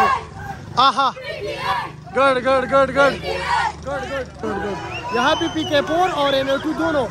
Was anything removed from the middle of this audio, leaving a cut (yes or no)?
yes